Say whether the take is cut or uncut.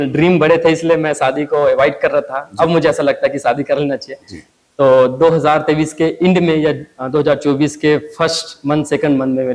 uncut